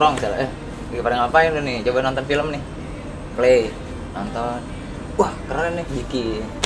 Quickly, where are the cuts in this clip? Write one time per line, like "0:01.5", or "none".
none